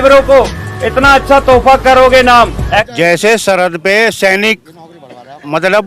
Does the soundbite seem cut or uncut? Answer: cut